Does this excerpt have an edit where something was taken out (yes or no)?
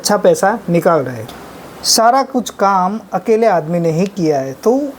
yes